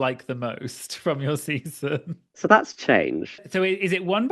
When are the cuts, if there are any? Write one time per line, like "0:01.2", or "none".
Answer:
0:02.2
0:03.4